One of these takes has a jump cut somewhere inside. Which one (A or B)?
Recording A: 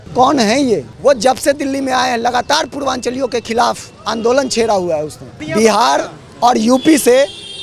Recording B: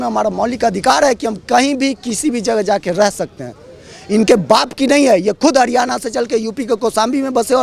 A